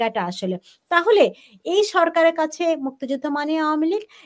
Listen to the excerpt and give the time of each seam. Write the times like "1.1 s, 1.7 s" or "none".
none